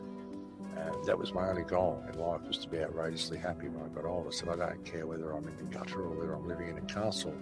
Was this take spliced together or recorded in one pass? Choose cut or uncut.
uncut